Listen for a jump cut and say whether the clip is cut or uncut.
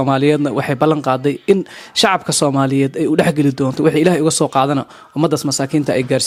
uncut